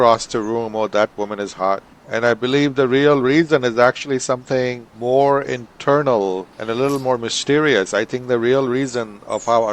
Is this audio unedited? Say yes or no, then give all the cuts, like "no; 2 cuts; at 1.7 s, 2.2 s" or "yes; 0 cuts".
no; 3 cuts; at 1.9 s, 4.9 s, 6.5 s